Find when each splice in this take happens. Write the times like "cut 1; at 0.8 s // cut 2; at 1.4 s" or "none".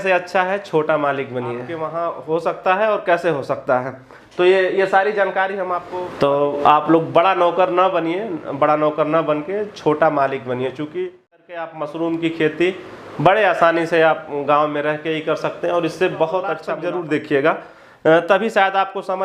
cut 1; at 1.8 s // cut 2; at 5.8 s // cut 3; at 11.3 s // cut 4; at 16.7 s